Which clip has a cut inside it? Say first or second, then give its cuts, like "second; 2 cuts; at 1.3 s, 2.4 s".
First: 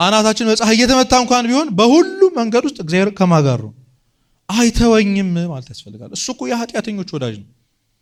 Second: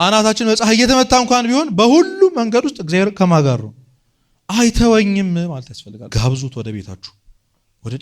second; 1 cut; at 6.1 s